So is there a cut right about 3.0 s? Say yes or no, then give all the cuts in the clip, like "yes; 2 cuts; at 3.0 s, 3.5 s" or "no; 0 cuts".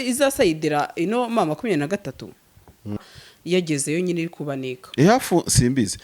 yes; 1 cut; at 3.0 s